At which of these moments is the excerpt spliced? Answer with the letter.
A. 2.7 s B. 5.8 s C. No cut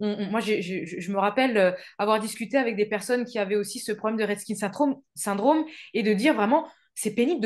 C